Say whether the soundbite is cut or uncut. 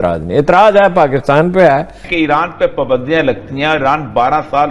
cut